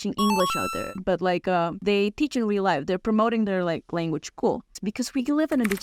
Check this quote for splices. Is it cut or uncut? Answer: cut